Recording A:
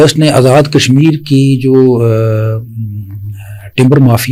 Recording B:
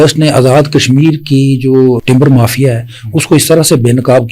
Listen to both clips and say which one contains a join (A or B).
B